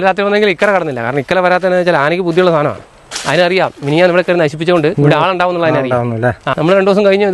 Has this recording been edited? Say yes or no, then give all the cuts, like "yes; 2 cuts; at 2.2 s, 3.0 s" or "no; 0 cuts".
yes; 2 cuts; at 4.9 s, 6.5 s